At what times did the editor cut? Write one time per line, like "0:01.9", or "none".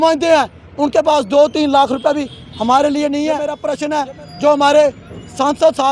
0:03.7